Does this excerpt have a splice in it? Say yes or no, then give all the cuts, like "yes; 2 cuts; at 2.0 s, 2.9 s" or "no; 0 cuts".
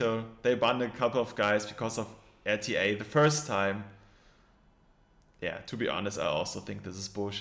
no; 0 cuts